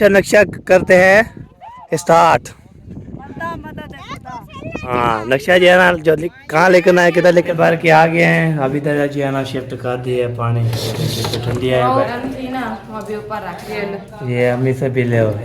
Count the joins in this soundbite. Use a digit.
3